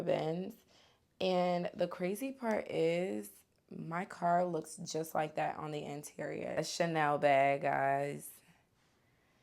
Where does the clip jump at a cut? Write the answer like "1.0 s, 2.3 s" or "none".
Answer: 6.6 s